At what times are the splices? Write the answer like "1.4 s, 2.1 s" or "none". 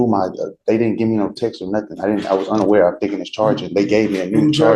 none